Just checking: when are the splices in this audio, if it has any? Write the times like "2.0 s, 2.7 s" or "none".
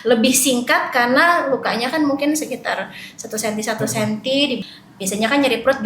4.6 s